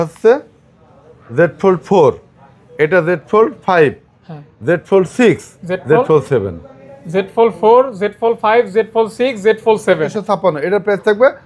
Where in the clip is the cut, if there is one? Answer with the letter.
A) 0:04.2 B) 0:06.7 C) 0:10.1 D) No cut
C